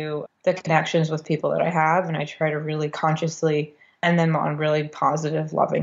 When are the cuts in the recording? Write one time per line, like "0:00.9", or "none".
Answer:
none